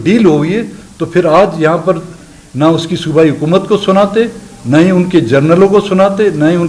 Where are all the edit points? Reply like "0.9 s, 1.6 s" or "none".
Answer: none